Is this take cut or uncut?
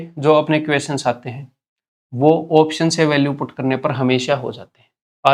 uncut